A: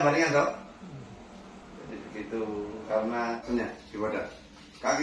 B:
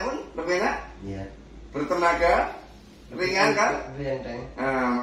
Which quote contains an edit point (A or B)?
A